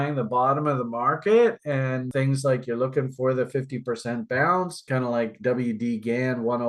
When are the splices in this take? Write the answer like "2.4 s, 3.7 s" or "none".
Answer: 2.1 s, 4.8 s